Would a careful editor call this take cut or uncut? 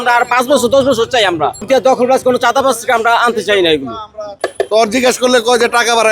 cut